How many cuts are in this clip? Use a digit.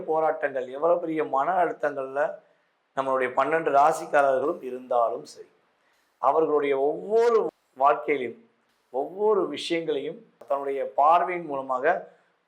1